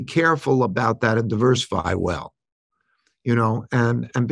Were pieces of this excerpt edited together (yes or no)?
no